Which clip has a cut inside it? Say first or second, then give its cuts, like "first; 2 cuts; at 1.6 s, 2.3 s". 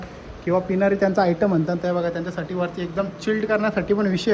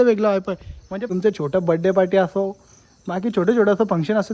second; 1 cut; at 1.0 s